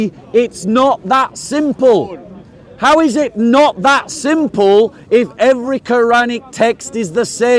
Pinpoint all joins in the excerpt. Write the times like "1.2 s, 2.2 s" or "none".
none